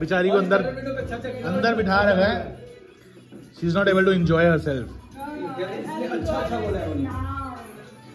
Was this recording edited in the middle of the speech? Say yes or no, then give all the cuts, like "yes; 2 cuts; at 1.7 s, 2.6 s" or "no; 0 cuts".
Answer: no; 0 cuts